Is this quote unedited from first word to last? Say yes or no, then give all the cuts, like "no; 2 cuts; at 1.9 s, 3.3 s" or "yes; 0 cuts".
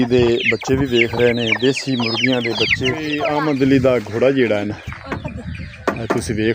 no; 1 cut; at 3.1 s